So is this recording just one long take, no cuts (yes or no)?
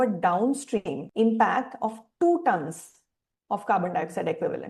no